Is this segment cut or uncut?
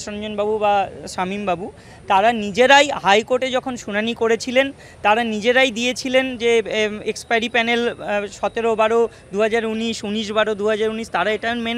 uncut